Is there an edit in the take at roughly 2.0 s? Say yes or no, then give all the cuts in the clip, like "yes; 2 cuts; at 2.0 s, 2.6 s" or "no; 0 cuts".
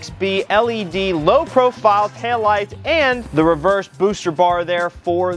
no; 1 cut; at 3.2 s